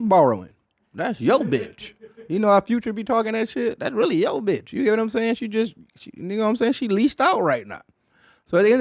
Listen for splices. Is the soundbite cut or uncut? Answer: uncut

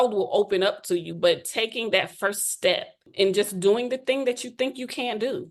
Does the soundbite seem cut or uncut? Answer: cut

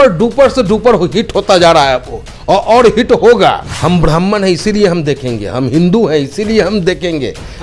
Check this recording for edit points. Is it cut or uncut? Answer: cut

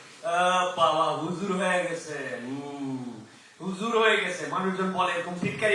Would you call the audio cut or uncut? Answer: uncut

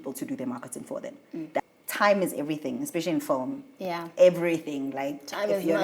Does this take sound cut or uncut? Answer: cut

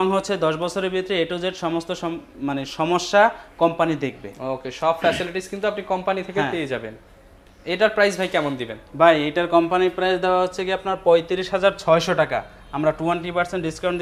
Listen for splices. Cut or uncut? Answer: uncut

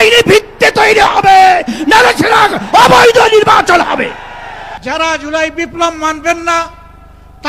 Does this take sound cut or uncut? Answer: cut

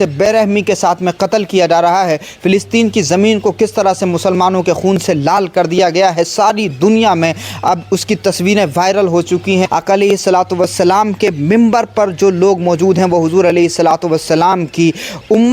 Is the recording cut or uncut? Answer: cut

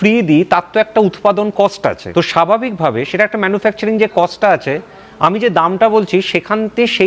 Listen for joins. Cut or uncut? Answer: cut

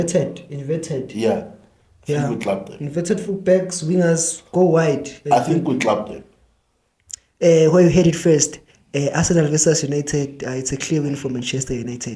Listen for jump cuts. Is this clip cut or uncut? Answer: uncut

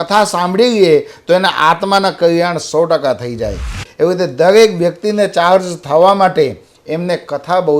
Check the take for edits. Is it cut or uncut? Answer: cut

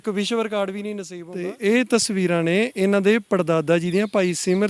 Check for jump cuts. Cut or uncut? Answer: cut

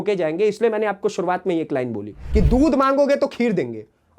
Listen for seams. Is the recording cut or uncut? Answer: cut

